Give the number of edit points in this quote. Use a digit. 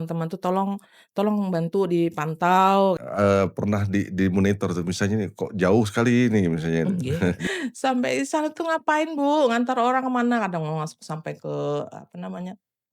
2